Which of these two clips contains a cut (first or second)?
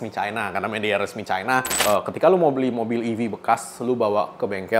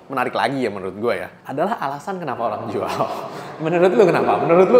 first